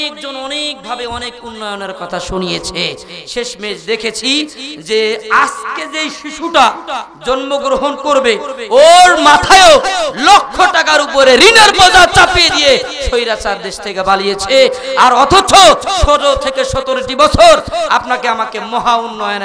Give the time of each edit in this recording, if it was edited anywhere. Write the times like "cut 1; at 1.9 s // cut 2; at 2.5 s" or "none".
none